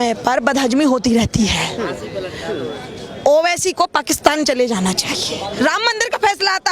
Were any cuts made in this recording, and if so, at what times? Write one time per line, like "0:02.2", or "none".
0:05.5